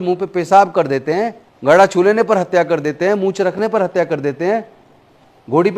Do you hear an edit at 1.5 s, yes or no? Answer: yes